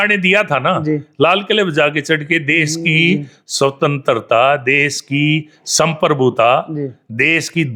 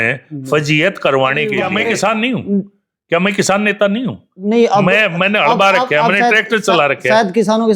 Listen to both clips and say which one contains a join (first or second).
second